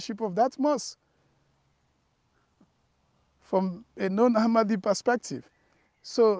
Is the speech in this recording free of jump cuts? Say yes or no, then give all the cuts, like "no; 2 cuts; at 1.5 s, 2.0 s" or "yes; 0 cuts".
yes; 0 cuts